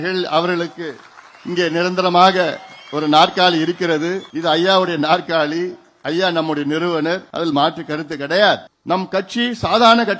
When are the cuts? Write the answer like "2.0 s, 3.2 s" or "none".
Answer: 4.3 s, 7.3 s, 8.7 s